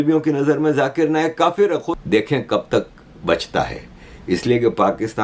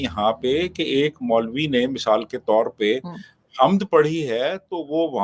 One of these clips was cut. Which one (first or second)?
first